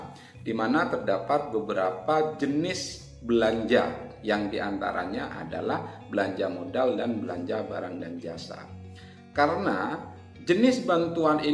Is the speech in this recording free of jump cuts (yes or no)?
yes